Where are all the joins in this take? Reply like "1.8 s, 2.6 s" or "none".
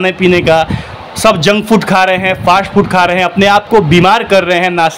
none